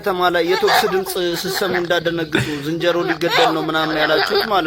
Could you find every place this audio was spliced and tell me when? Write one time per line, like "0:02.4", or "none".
none